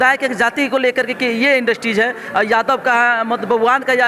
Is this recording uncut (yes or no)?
yes